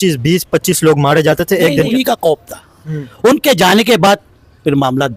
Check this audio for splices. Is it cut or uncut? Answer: cut